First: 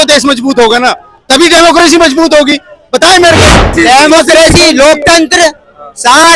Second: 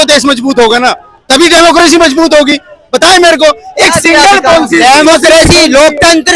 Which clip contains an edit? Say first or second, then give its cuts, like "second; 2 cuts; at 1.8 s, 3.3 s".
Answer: first; 1 cut; at 3.7 s